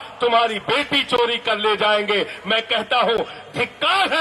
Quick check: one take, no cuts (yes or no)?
yes